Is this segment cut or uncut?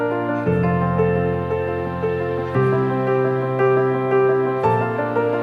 uncut